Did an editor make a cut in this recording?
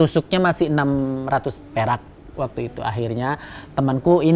no; 0 cuts

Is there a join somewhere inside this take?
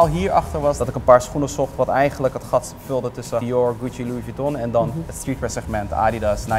yes; 3 cuts; at 0.9 s, 3.4 s, 5.1 s

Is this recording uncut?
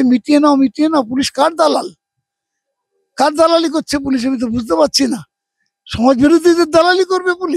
yes; 0 cuts

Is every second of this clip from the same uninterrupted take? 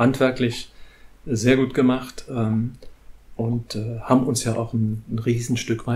yes; 0 cuts

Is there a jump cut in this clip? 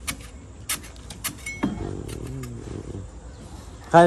no; 0 cuts

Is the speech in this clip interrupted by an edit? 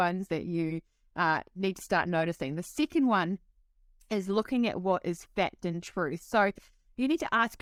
no; 0 cuts

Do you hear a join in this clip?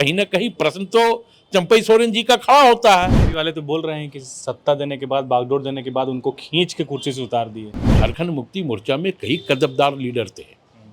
yes; 2 cuts; at 3.2 s, 7.9 s

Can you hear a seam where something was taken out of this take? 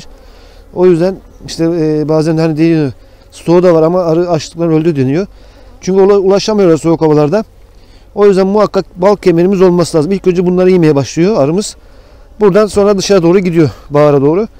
no; 0 cuts

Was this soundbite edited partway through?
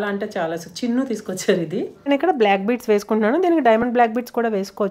yes; 1 cut; at 1.9 s

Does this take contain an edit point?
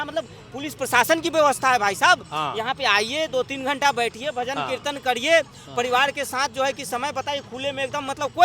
no; 0 cuts

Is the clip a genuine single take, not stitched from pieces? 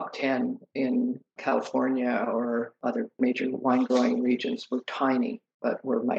no; 2 cuts; at 1.4 s, 2.8 s

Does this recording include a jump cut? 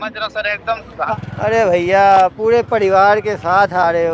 yes; 1 cut; at 1.1 s

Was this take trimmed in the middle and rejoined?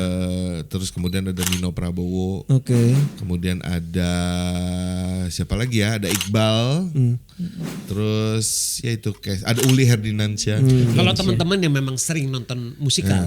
no; 0 cuts

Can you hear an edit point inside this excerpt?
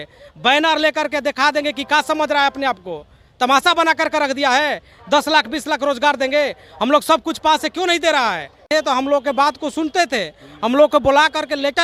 yes; 1 cut; at 8.6 s

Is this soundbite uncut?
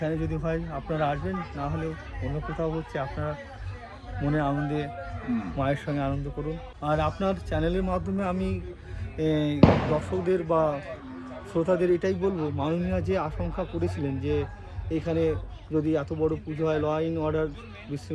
no; 1 cut; at 6.7 s

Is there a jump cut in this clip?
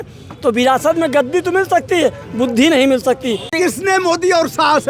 yes; 1 cut; at 3.5 s

